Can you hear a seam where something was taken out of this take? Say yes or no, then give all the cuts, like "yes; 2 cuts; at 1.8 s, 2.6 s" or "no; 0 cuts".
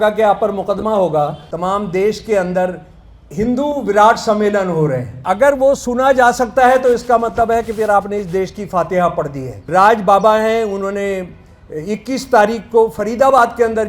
yes; 3 cuts; at 1.4 s, 5.1 s, 9.6 s